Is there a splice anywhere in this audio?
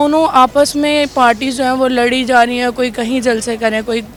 no; 0 cuts

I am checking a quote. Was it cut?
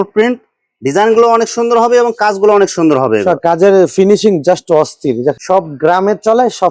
yes; 1 cut; at 5.4 s

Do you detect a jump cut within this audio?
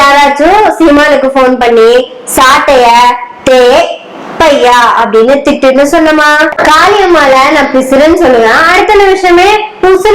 yes; 1 cut; at 6.5 s

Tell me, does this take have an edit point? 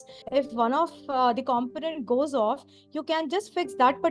no; 0 cuts

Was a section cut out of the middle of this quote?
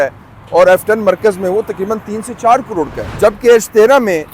yes; 1 cut; at 3.0 s

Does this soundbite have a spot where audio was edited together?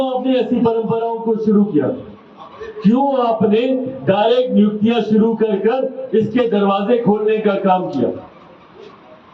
no; 0 cuts

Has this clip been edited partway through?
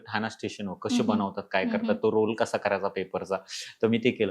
no; 0 cuts

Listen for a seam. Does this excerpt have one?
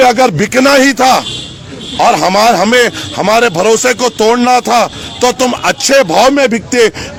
no; 0 cuts

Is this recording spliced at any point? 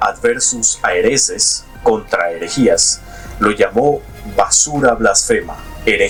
no; 0 cuts

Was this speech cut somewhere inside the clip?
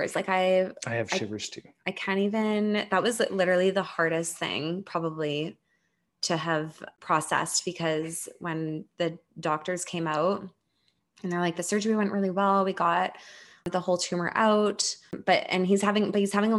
yes; 3 cuts; at 6.9 s, 13.7 s, 15.2 s

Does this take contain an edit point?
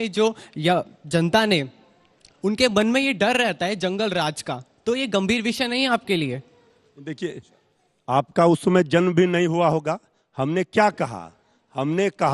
no; 0 cuts

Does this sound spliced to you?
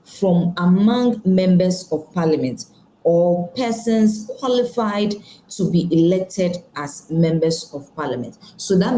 no; 0 cuts

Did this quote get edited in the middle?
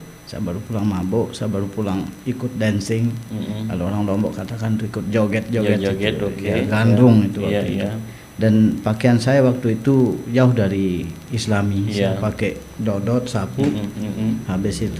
no; 0 cuts

